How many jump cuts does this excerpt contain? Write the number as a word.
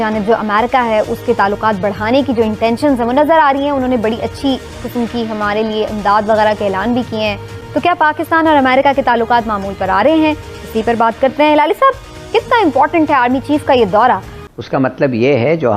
two